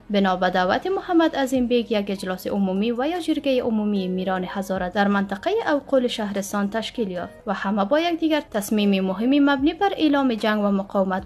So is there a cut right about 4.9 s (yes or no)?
no